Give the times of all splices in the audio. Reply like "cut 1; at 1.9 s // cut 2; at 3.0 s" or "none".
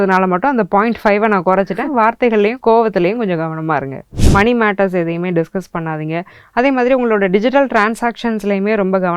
cut 1; at 4.1 s